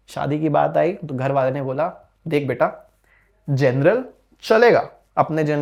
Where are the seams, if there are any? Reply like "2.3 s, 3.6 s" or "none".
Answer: none